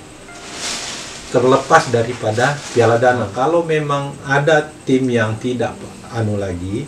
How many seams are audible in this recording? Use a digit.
1